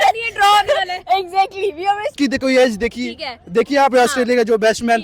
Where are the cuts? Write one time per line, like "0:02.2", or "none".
0:02.1